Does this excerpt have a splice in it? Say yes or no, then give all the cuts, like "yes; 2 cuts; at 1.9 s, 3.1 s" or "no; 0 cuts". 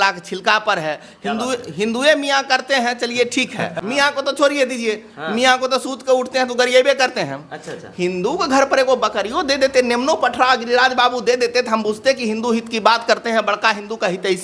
yes; 1 cut; at 3.7 s